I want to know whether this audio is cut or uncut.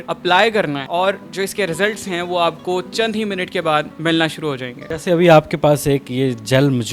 uncut